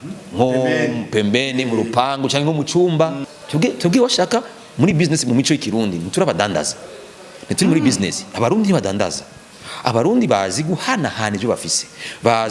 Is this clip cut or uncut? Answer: cut